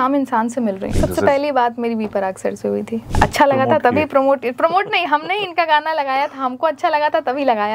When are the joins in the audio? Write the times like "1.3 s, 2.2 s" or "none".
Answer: 0.9 s, 3.0 s

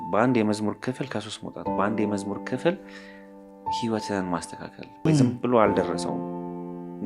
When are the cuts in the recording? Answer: 5.1 s

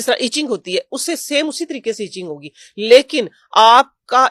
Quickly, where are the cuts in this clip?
none

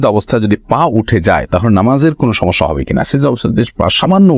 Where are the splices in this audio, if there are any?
none

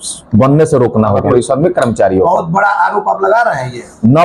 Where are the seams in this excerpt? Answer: 1.3 s

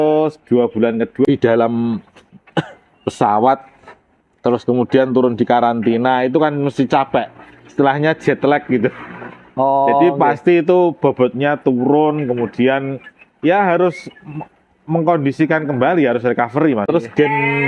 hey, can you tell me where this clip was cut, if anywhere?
1.2 s, 16.9 s

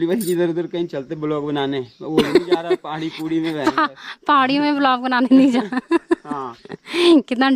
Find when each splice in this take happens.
none

